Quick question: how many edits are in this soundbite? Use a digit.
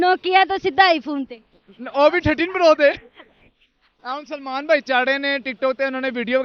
0